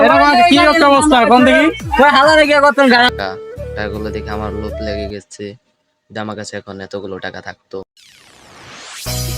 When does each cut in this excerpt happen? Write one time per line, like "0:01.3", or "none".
0:03.1